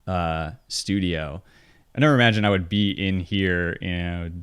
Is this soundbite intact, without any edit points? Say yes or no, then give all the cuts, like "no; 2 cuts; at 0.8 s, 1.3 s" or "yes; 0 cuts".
no; 1 cut; at 1.8 s